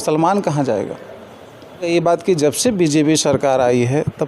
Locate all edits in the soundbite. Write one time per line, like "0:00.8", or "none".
0:01.9